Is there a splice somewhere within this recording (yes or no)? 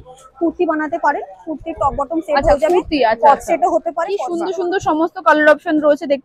yes